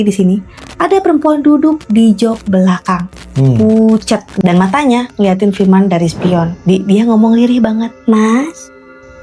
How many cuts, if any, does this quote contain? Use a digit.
3